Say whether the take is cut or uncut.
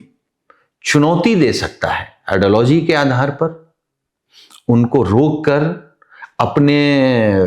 uncut